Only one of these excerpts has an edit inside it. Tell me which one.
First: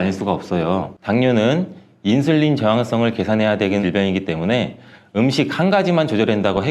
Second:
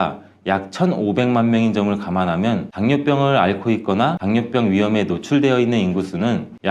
first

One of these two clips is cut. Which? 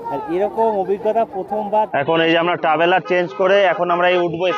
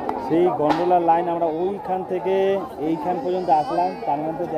first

